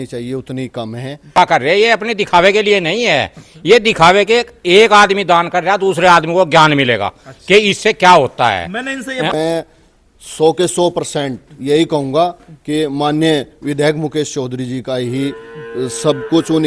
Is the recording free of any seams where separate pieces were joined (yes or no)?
no